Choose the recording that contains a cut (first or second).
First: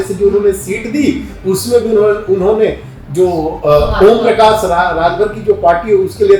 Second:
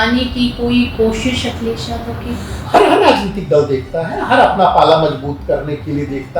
second